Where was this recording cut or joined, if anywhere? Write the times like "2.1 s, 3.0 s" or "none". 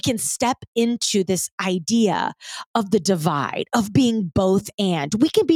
none